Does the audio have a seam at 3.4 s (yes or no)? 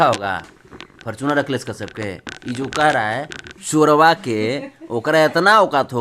yes